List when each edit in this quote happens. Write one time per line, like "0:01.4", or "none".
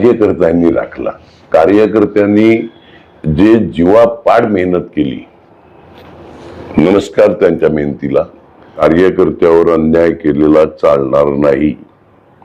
0:08.8